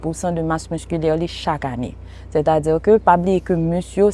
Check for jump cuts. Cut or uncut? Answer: uncut